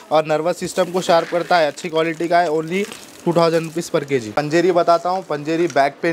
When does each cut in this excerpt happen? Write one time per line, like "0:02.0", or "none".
none